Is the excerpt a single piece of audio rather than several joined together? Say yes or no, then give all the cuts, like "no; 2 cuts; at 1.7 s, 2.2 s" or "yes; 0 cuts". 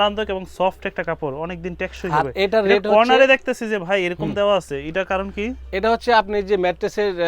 yes; 0 cuts